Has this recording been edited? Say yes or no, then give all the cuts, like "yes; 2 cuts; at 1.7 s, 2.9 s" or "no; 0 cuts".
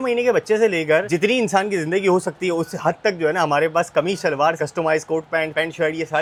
no; 0 cuts